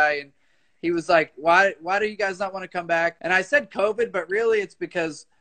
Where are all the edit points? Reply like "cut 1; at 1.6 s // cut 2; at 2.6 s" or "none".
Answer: cut 1; at 3.2 s